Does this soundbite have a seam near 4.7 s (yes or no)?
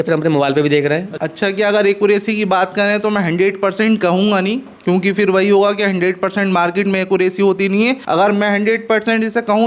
no